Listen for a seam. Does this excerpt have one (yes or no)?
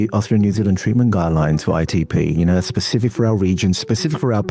no